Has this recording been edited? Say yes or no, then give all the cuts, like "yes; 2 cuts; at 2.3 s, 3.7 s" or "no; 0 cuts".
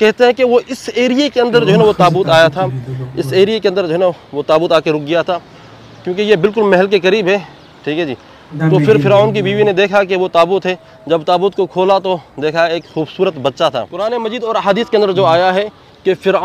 yes; 1 cut; at 13.9 s